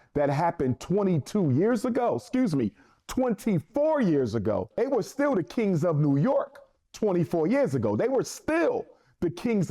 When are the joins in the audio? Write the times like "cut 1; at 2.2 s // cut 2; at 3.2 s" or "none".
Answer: cut 1; at 4.8 s